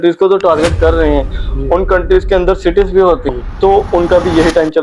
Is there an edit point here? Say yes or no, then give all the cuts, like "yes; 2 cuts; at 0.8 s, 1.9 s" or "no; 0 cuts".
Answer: yes; 1 cut; at 3.3 s